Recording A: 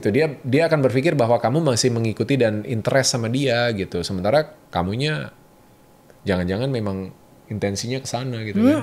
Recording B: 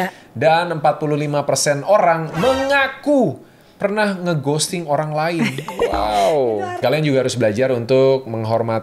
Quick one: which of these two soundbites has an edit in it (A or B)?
B